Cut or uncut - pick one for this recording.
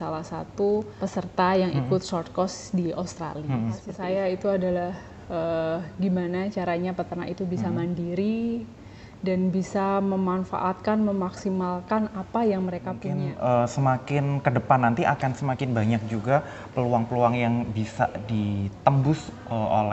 cut